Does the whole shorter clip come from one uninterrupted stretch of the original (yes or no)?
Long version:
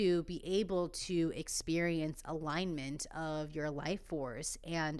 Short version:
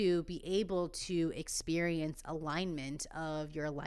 yes